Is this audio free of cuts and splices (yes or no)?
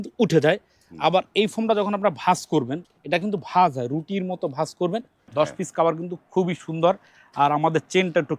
no